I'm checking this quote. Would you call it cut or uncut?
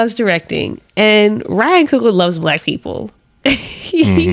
uncut